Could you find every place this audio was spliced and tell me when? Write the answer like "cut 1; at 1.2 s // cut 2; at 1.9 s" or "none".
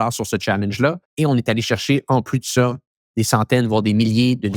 cut 1; at 1.1 s